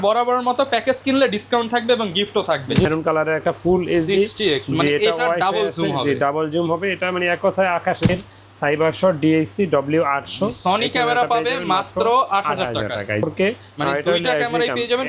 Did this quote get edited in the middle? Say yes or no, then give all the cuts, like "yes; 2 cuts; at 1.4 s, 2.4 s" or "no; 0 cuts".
yes; 3 cuts; at 2.9 s, 8.1 s, 13.2 s